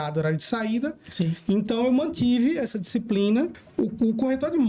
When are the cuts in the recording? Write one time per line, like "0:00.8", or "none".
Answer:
0:03.6